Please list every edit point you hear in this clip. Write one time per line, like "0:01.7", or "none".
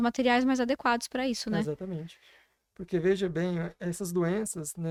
none